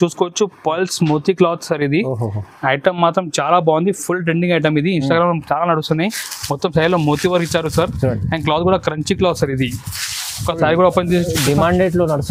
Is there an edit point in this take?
no; 0 cuts

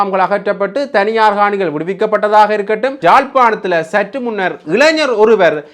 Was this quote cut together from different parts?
yes; 1 cut; at 3.0 s

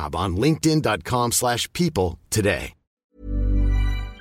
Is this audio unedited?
no; 1 cut; at 3.0 s

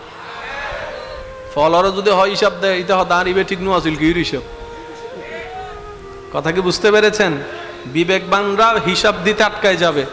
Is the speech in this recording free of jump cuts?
yes; 0 cuts

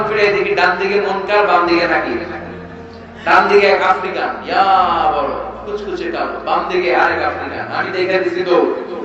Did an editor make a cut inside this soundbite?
no; 0 cuts

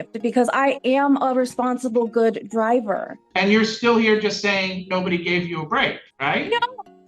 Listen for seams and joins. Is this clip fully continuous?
no; 2 cuts; at 3.2 s, 6.1 s

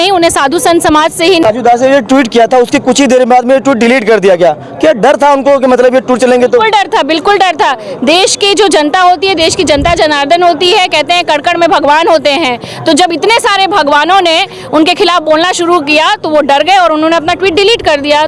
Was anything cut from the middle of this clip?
yes; 1 cut; at 1.4 s

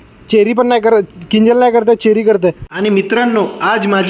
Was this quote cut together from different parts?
yes; 1 cut; at 2.7 s

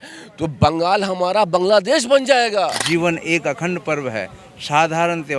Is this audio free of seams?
no; 1 cut; at 2.8 s

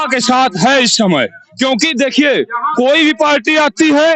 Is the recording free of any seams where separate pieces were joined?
yes; 0 cuts

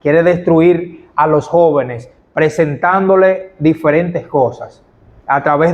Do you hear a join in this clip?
no; 0 cuts

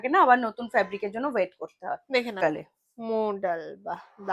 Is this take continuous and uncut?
no; 1 cut; at 2.4 s

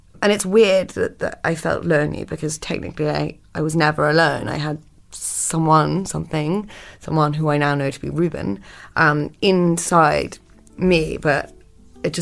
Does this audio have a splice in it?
no; 0 cuts

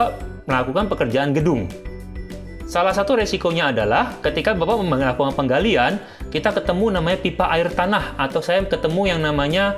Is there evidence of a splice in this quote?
no; 0 cuts

